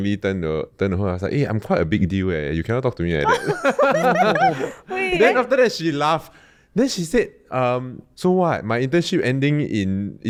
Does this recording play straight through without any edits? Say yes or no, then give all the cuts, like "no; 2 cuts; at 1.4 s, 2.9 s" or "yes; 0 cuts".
yes; 0 cuts